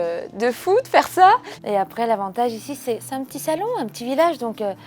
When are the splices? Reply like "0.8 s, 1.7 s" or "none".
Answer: 1.6 s

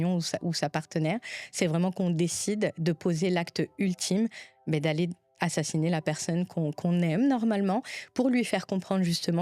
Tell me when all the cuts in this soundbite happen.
none

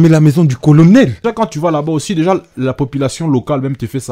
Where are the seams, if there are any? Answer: 1.2 s

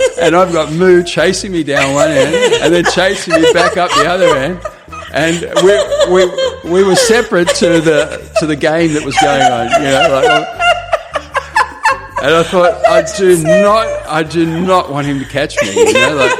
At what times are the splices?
none

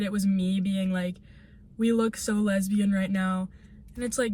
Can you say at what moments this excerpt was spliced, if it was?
none

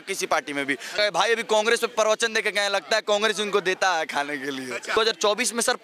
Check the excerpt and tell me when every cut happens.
0.9 s, 4.9 s

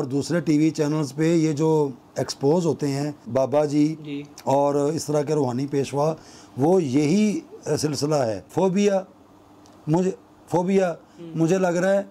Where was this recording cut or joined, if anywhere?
3.2 s, 8.5 s

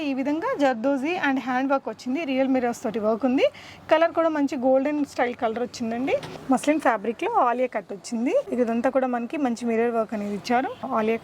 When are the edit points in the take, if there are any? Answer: 6.3 s, 8.5 s

